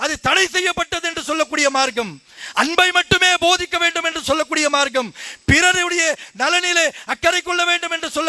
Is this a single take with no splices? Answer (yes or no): yes